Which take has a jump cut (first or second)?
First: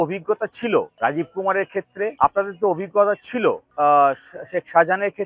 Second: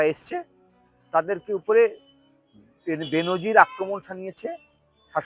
first